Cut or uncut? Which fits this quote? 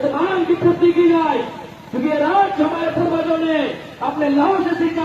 uncut